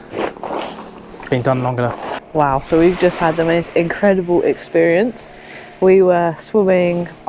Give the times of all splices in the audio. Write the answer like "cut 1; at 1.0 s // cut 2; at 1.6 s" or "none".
cut 1; at 2.2 s

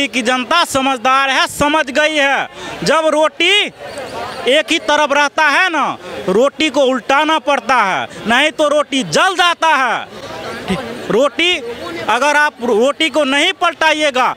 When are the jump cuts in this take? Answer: none

